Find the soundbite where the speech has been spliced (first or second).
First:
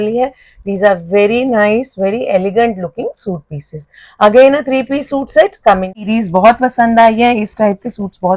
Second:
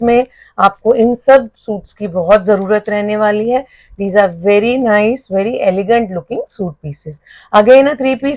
first